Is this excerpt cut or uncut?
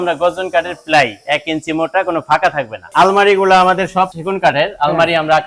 cut